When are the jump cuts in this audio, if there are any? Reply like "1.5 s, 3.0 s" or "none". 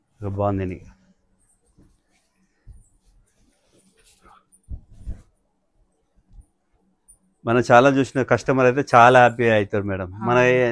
none